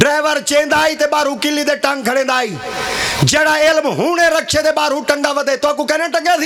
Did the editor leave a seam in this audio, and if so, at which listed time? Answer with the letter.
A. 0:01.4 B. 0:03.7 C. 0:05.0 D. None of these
D